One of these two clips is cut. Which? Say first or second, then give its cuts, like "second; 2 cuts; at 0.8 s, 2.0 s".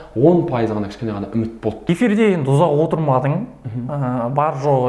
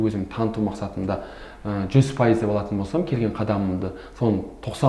first; 1 cut; at 1.9 s